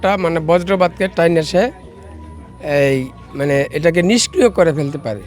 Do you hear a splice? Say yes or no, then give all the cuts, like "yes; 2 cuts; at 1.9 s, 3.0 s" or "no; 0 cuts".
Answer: no; 0 cuts